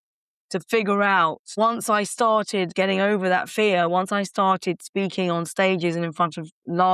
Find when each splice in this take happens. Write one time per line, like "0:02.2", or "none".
0:01.5
0:02.7